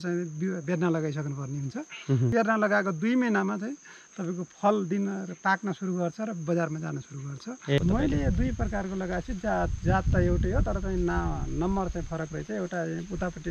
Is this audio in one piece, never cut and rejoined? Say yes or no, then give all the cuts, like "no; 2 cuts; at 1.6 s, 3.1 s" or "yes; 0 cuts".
no; 2 cuts; at 2.3 s, 7.8 s